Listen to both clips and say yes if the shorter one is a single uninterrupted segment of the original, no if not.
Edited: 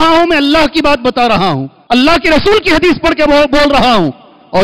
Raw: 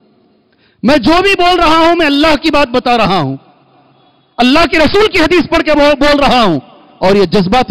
no